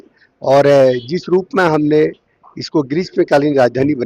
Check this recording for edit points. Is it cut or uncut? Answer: uncut